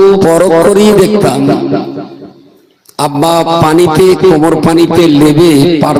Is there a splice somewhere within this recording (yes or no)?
no